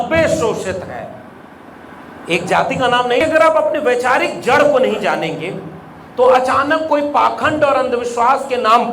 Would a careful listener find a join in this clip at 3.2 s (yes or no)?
yes